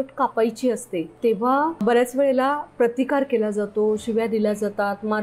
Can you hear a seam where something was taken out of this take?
yes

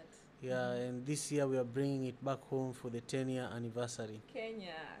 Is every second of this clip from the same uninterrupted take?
yes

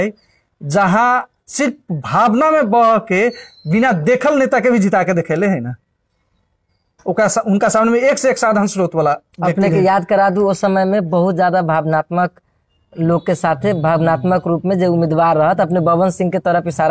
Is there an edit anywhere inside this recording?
no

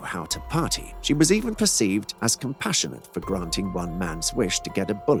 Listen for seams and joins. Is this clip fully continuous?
yes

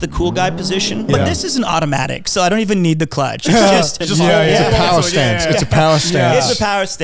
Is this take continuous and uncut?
no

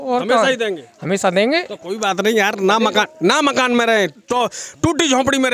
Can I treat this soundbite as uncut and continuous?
no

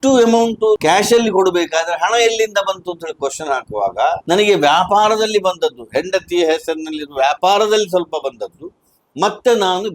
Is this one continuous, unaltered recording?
no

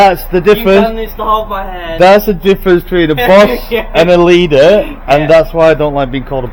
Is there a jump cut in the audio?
no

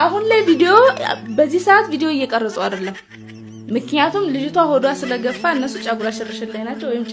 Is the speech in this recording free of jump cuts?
yes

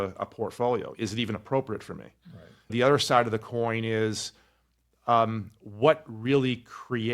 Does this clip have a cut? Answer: yes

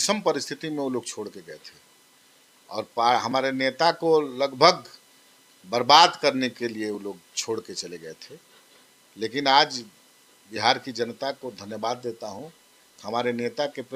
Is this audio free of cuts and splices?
yes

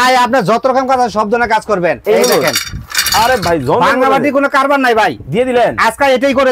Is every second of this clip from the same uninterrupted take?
no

